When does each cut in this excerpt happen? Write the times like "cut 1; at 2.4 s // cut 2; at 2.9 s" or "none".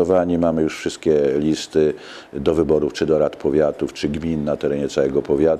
none